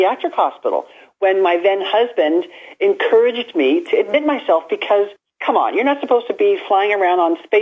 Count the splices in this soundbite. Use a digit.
1